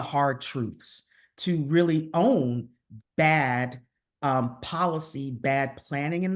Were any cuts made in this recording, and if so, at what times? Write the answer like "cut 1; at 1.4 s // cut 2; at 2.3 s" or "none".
none